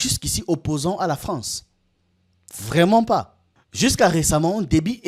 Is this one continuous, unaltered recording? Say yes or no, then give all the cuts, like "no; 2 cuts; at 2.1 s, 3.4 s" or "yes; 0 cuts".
yes; 0 cuts